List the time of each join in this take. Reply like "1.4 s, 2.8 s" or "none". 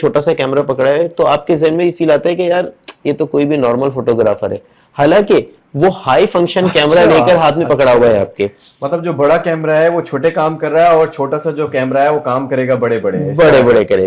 none